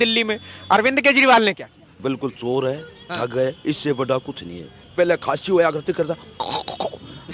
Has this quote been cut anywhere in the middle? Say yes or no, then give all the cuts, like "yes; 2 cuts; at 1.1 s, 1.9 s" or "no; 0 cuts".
yes; 2 cuts; at 1.9 s, 4.9 s